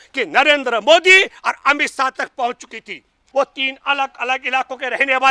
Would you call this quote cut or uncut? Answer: cut